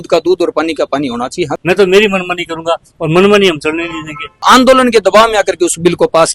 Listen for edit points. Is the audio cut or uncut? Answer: cut